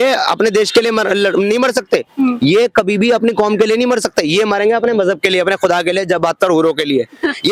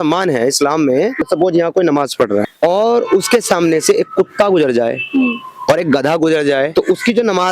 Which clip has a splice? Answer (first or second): second